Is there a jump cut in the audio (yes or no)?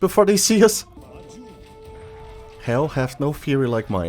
yes